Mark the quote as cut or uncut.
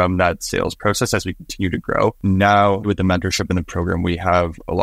cut